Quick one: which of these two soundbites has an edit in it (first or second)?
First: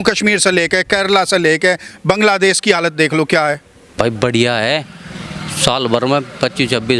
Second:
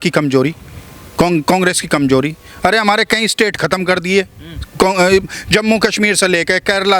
first